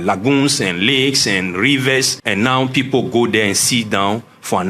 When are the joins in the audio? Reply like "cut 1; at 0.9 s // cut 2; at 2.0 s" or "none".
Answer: cut 1; at 2.2 s